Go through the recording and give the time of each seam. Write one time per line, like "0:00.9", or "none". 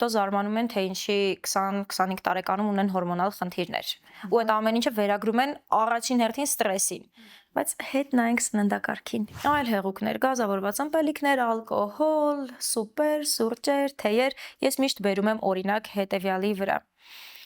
0:09.3